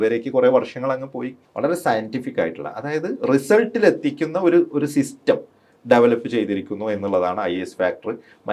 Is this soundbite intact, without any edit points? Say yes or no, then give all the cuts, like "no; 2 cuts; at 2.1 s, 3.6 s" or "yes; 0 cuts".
no; 1 cut; at 1.4 s